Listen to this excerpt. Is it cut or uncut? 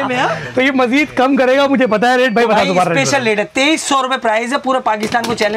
uncut